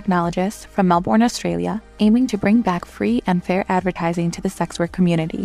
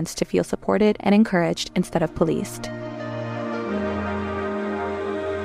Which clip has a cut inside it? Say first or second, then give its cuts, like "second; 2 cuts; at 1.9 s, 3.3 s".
second; 1 cut; at 2.6 s